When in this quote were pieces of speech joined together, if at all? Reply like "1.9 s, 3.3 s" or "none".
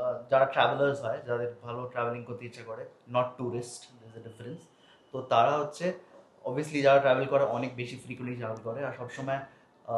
none